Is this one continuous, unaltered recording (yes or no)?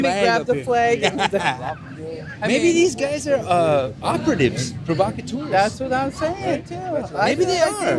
no